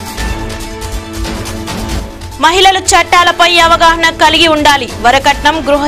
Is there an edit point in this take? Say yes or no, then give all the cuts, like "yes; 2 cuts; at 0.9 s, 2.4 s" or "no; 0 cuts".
no; 0 cuts